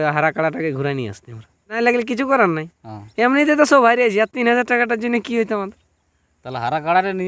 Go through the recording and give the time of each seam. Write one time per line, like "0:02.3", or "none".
0:01.8